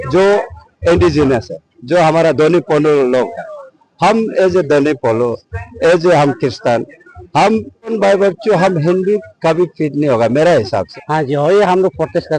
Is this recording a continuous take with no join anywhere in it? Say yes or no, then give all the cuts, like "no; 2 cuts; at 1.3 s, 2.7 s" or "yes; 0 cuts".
no; 2 cuts; at 7.9 s, 10.9 s